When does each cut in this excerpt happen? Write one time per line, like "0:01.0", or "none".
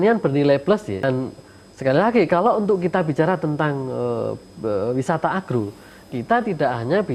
0:01.0

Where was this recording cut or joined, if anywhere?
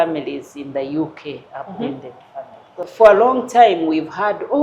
0:02.9

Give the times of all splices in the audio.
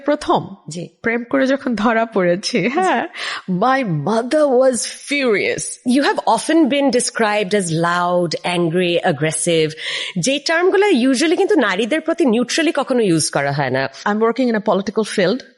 0:05.7
0:14.0

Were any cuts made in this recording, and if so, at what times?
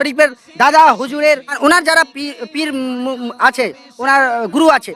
0:01.6

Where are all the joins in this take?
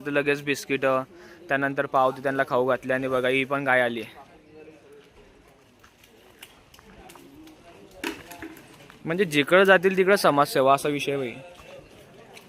none

